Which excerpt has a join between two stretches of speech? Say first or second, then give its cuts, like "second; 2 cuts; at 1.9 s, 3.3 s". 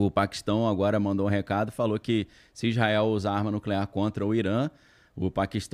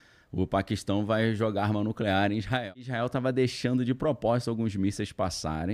second; 1 cut; at 2.6 s